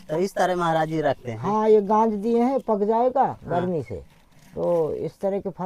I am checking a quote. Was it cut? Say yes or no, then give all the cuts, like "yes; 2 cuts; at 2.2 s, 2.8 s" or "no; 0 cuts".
no; 0 cuts